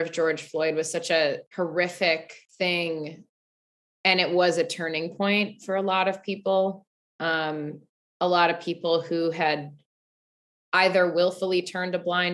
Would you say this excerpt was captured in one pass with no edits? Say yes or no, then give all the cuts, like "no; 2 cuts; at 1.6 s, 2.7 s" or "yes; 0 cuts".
no; 2 cuts; at 1.5 s, 2.4 s